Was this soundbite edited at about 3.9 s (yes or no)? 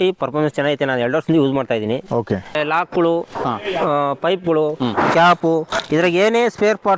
no